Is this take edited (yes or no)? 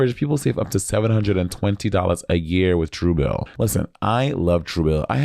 yes